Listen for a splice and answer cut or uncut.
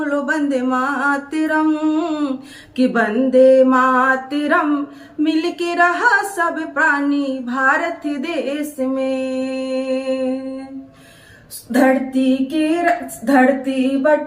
uncut